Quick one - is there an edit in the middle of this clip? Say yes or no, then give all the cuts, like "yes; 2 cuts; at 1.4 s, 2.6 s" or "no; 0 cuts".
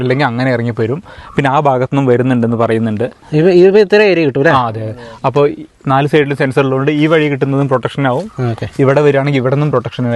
no; 0 cuts